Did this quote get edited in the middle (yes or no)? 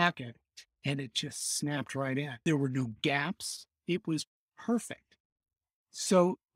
yes